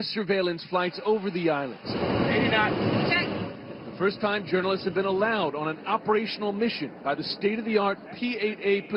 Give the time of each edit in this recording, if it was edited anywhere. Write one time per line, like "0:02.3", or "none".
none